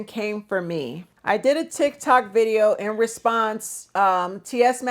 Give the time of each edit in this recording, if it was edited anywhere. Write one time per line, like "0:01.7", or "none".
0:01.1